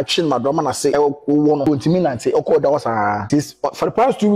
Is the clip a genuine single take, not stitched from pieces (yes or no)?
no